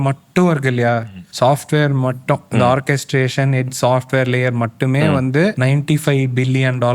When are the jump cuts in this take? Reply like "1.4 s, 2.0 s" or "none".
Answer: 1.0 s, 5.6 s